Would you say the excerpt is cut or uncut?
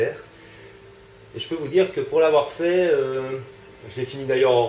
cut